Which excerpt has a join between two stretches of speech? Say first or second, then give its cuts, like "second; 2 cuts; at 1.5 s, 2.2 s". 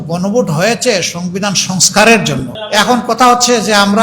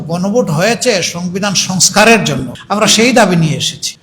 first; 1 cut; at 2.6 s